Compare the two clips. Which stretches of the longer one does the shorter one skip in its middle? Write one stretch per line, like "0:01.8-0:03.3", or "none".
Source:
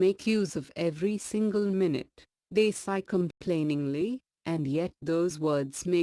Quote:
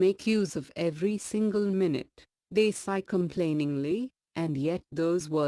0:03.3-0:03.4